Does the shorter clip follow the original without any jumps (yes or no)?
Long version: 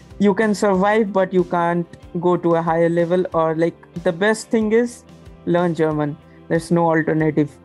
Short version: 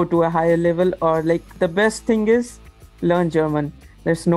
no